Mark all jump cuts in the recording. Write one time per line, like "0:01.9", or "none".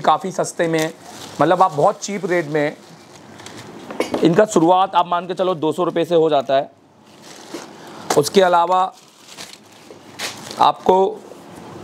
none